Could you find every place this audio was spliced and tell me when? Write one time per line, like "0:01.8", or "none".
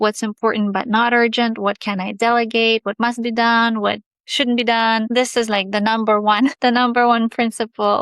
0:05.1
0:06.5

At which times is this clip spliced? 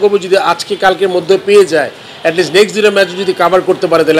none

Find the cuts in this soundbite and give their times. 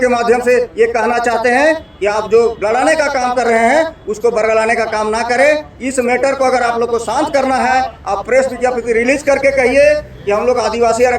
none

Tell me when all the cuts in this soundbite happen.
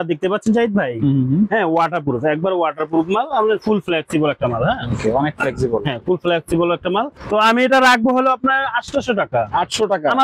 0:07.2

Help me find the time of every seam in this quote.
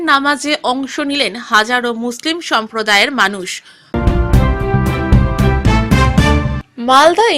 0:03.8
0:06.5

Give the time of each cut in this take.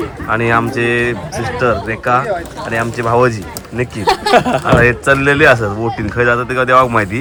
none

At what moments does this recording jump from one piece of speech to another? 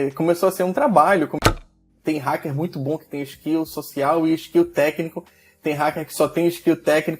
0:01.4

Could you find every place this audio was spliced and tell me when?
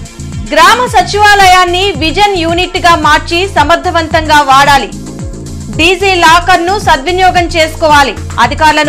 none

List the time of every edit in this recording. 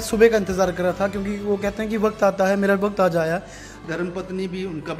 0:03.7

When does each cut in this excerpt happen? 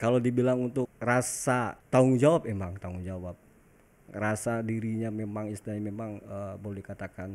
0:00.9
0:01.8

